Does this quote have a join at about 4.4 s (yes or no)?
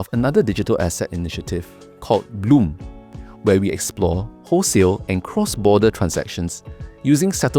no